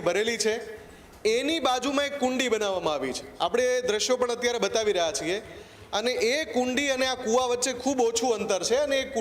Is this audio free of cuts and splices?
yes; 0 cuts

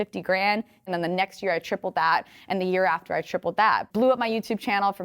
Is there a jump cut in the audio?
yes; 2 cuts; at 0.9 s, 3.8 s

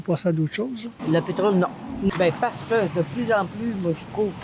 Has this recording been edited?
yes; 2 cuts; at 0.9 s, 2.1 s

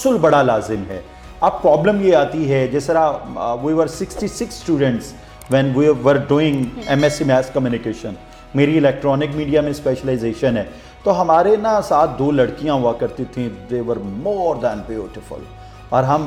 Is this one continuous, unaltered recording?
yes; 0 cuts

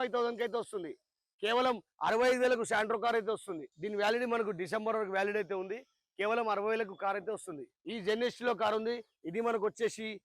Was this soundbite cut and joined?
yes; 2 cuts; at 3.7 s, 7.8 s

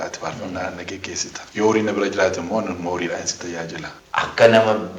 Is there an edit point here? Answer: yes; 2 cuts; at 1.4 s, 3.9 s

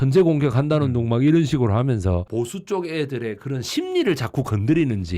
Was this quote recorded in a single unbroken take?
no; 1 cut; at 2.3 s

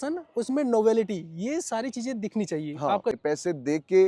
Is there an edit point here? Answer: yes; 1 cut; at 3.2 s

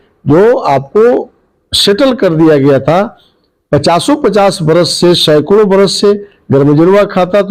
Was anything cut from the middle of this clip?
no; 0 cuts

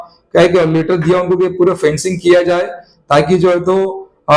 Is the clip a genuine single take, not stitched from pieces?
yes; 0 cuts

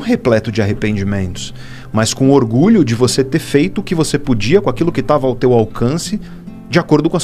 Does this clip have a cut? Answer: no; 0 cuts

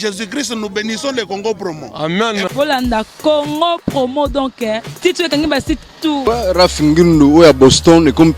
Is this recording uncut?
no; 1 cut; at 6.2 s

